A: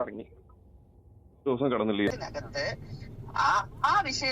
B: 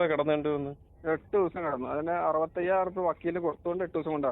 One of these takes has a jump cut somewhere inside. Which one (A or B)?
A